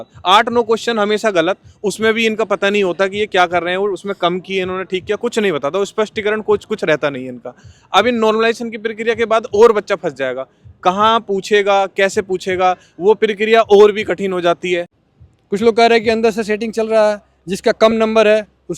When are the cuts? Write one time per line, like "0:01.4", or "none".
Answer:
0:14.9